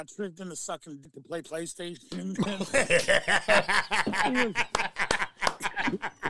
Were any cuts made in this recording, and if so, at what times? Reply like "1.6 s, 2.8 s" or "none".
1.1 s